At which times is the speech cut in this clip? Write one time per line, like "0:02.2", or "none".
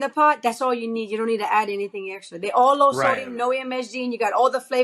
none